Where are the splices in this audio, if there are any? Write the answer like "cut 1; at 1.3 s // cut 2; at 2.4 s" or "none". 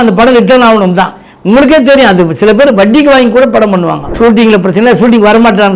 cut 1; at 4.0 s